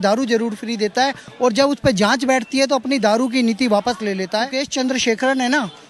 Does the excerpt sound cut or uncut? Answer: cut